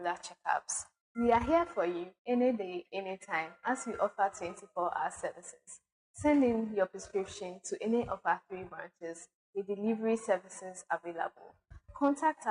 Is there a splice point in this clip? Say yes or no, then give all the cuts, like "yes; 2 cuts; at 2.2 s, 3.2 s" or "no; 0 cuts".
no; 0 cuts